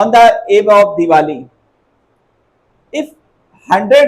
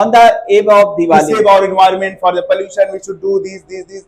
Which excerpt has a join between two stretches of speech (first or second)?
second